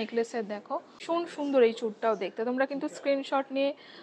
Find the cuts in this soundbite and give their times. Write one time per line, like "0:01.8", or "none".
0:00.9